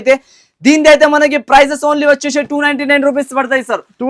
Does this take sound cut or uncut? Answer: uncut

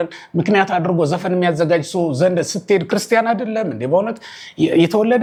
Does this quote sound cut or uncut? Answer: uncut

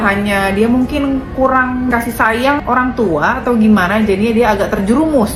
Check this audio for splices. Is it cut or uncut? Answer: uncut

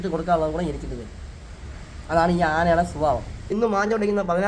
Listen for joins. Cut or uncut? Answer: cut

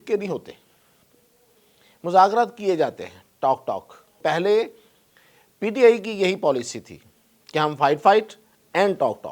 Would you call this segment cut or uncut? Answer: cut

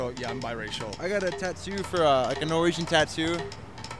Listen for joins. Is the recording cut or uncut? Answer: cut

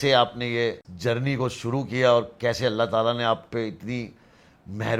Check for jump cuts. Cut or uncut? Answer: uncut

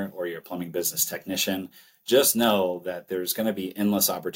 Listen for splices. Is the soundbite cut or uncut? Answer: uncut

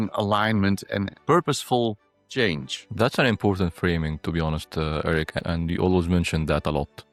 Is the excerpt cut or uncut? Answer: uncut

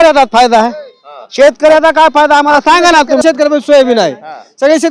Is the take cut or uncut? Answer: cut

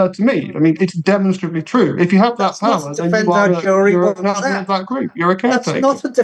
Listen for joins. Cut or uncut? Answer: uncut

